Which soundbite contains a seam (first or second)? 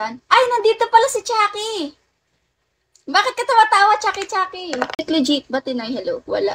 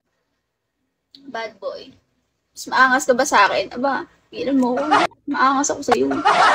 first